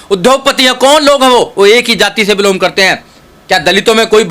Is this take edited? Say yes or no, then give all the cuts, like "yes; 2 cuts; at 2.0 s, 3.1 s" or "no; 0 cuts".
no; 0 cuts